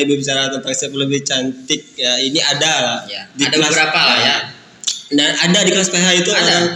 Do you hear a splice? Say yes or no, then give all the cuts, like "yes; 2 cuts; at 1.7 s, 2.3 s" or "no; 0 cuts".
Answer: no; 0 cuts